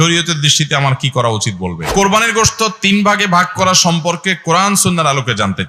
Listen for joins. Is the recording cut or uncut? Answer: cut